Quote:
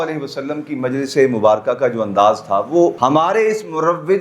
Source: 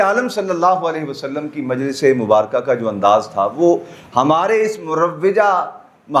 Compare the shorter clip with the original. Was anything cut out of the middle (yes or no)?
yes